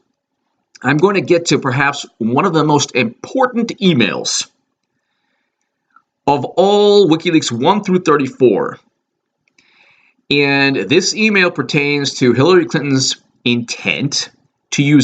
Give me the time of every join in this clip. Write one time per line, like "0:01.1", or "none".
0:04.0